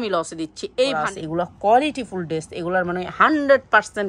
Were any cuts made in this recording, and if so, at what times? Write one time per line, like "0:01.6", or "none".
0:01.1